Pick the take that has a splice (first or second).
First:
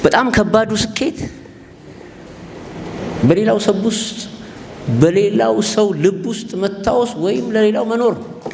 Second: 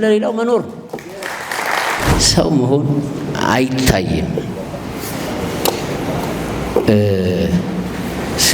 second